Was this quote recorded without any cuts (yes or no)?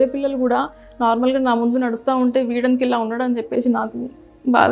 yes